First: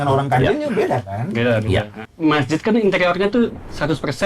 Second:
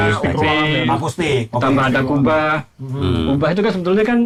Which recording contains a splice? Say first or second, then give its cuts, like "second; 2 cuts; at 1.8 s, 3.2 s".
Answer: first; 1 cut; at 2.0 s